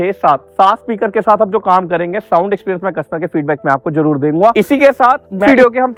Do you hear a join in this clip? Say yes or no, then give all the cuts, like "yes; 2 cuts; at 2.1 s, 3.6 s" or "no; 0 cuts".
no; 0 cuts